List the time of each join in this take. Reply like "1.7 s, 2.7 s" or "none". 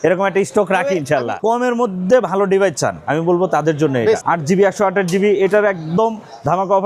1.4 s, 4.2 s